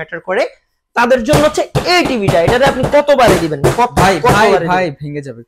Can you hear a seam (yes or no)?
no